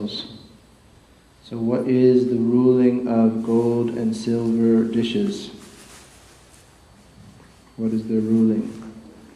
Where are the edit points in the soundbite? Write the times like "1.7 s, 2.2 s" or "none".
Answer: 1.9 s